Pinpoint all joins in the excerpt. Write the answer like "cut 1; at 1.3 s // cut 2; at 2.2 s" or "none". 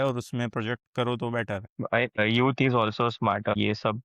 cut 1; at 2.2 s